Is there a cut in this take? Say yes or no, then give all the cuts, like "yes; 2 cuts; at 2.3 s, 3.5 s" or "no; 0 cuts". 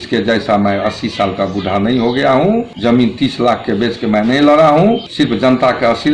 yes; 2 cuts; at 2.7 s, 5.1 s